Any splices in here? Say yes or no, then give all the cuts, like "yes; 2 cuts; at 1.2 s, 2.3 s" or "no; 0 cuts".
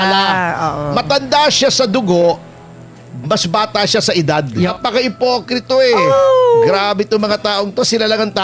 yes; 1 cut; at 4.7 s